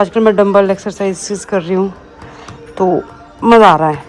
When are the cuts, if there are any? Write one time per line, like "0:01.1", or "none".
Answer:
none